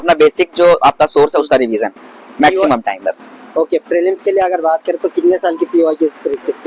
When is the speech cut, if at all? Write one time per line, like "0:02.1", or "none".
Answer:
none